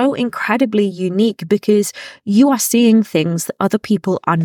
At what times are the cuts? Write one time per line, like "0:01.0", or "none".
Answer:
none